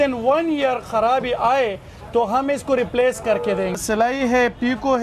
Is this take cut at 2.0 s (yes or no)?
no